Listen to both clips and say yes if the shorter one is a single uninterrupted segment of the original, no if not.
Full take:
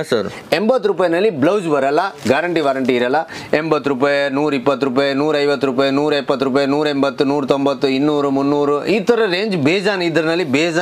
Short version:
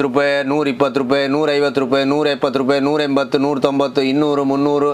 yes